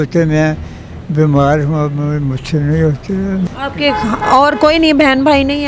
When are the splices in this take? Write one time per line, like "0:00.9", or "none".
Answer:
0:03.5